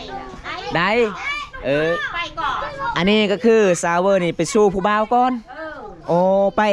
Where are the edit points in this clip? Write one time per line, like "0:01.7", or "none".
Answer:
none